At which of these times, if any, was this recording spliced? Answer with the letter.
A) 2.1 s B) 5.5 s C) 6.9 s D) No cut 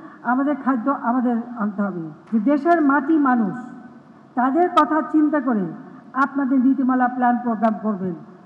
A